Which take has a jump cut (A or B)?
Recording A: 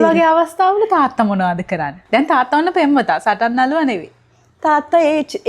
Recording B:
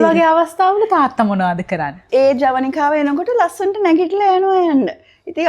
B